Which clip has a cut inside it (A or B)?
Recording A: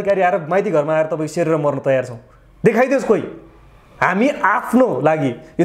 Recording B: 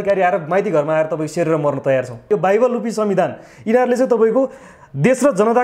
B